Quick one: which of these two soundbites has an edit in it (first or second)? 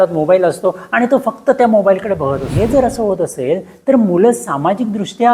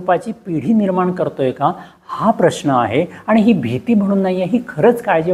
first